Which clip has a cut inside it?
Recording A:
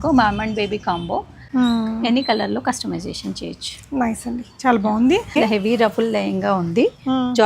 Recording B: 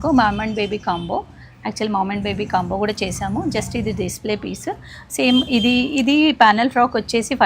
A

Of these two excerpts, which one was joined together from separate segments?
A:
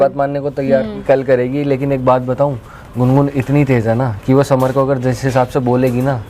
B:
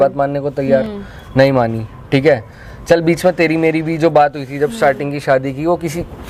A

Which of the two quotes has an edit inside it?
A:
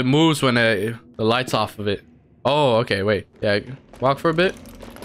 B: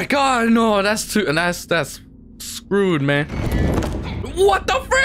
A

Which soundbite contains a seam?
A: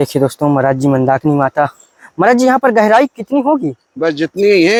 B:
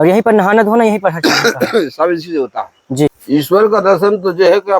B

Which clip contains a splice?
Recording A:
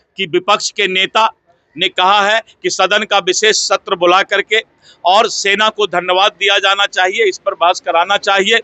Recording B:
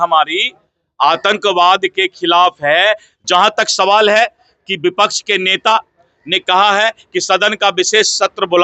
B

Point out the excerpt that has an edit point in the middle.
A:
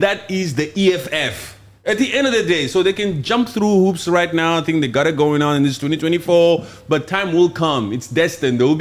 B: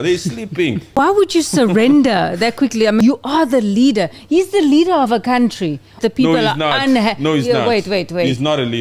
B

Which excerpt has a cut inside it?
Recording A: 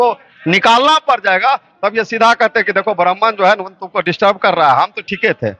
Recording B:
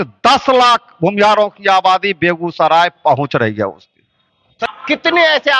B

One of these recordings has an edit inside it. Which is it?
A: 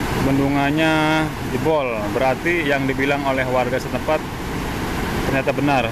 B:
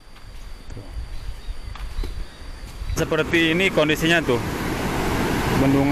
B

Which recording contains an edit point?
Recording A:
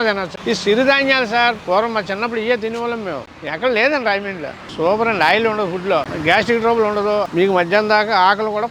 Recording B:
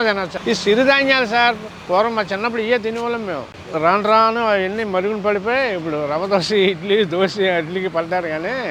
A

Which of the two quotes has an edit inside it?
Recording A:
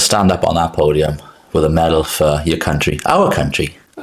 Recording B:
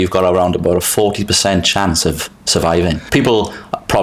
B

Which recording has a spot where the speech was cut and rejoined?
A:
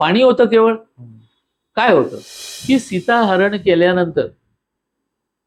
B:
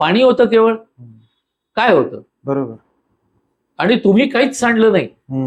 A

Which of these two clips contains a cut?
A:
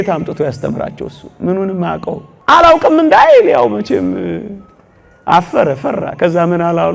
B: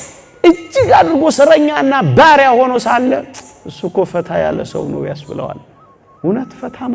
A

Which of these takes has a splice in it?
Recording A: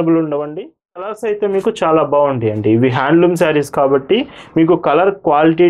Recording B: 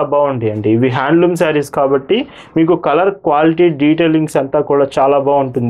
A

